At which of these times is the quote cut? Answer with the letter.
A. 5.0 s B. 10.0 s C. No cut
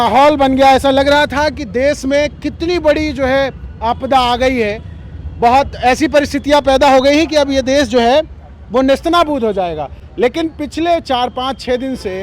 C